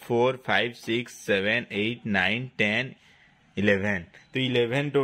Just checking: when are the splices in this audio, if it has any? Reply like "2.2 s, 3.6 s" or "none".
none

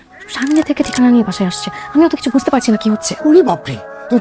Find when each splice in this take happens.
none

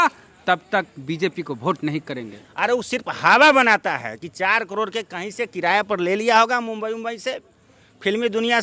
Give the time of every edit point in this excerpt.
2.4 s

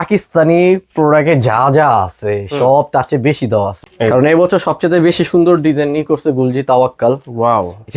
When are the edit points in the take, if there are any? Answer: 3.8 s

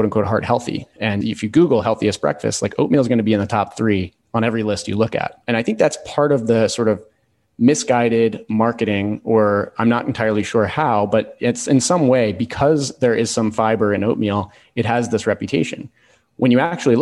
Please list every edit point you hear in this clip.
1.2 s, 5.4 s

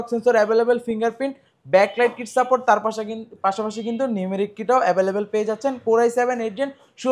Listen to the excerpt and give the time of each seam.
none

